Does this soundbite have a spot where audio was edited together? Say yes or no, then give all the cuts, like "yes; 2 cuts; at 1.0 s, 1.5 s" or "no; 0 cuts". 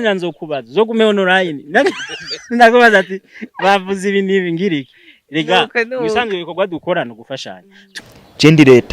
yes; 1 cut; at 7.8 s